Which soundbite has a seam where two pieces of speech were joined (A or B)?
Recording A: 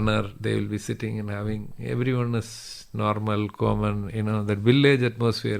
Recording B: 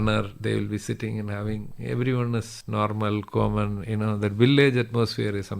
B